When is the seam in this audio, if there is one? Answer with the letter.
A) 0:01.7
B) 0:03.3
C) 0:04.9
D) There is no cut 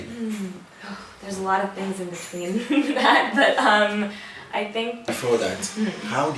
C